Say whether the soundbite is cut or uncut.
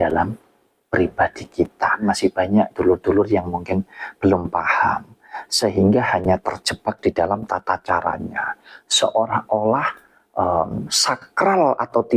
cut